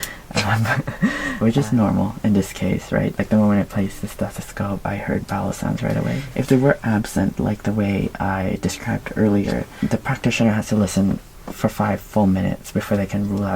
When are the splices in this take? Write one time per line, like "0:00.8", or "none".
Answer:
0:01.3
0:06.3
0:09.7

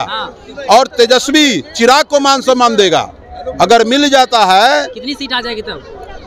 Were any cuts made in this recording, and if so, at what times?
none

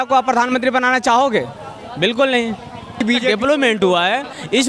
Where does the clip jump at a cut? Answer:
0:03.0

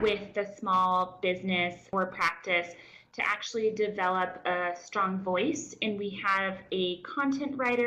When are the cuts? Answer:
0:01.9

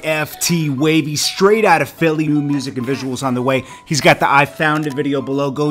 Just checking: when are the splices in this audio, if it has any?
0:02.3

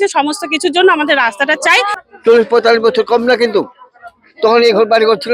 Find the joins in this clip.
0:01.9

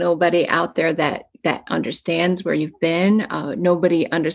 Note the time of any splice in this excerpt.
none

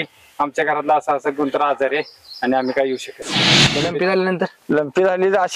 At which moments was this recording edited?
0:03.6

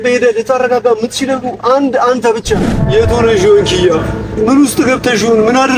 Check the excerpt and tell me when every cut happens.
0:02.7

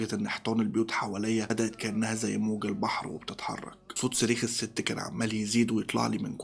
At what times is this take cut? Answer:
none

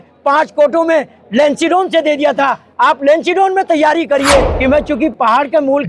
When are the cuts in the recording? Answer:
0:04.5

